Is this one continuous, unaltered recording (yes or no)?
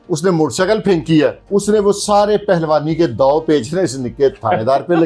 no